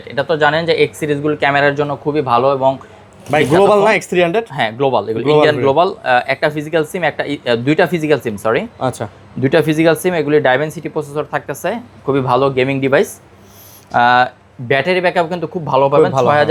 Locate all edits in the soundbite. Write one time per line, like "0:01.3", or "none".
none